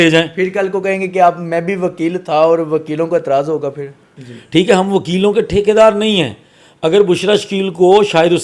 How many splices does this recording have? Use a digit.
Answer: 1